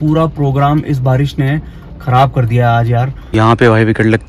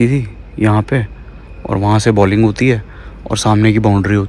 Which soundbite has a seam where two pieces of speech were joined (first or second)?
first